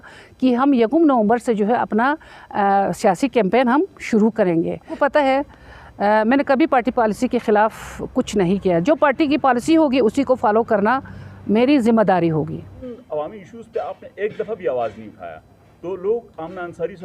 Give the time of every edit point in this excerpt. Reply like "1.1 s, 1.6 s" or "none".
4.9 s, 12.8 s